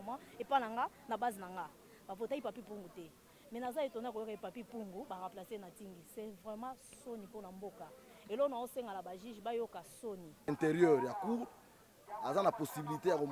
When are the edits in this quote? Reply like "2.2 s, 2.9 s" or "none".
10.5 s